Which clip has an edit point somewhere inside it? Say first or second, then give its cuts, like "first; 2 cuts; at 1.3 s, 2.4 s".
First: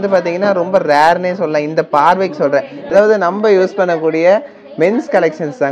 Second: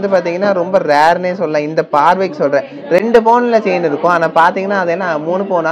first; 1 cut; at 2.8 s